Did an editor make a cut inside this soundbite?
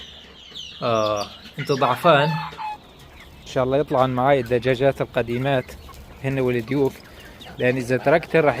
yes; 1 cut; at 2.6 s

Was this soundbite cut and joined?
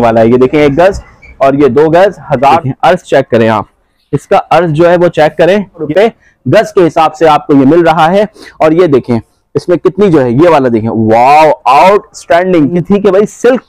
yes; 3 cuts; at 2.6 s, 5.9 s, 12.7 s

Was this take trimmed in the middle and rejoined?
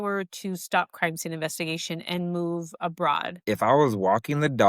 yes; 1 cut; at 3.4 s

